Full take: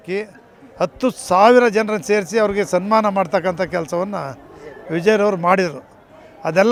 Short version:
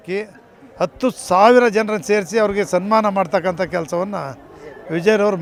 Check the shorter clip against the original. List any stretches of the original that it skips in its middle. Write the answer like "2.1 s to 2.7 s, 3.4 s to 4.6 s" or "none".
none